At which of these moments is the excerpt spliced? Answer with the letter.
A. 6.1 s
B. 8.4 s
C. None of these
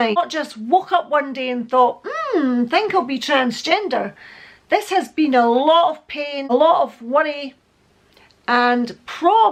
C